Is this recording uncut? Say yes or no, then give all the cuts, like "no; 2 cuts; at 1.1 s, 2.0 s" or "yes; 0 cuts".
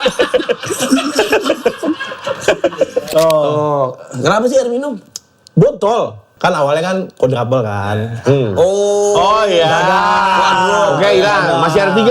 no; 2 cuts; at 3.0 s, 6.2 s